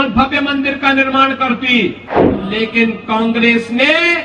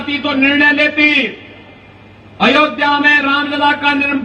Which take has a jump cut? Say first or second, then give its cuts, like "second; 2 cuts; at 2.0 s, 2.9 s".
first; 1 cut; at 2.4 s